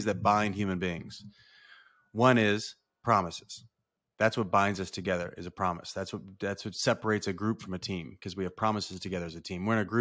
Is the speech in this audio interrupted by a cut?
no; 0 cuts

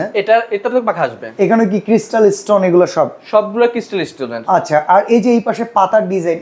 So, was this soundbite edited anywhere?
no; 0 cuts

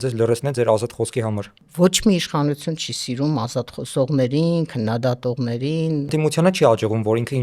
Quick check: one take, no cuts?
no; 2 cuts; at 1.6 s, 6.1 s

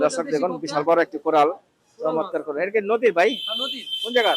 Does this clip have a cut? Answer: no; 0 cuts

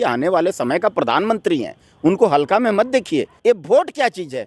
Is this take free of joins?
no; 1 cut; at 3.3 s

